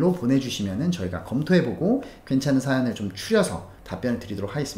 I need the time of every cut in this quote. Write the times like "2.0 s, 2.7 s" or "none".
3.8 s